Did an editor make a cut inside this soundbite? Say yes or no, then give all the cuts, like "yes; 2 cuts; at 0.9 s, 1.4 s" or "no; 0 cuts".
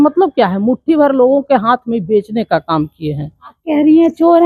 no; 0 cuts